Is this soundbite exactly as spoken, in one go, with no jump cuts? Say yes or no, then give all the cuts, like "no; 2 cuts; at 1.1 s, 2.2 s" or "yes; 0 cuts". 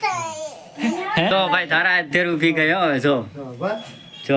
no; 1 cut; at 1.3 s